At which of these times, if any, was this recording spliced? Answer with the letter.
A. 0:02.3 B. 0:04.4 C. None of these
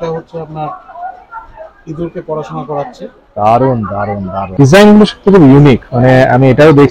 B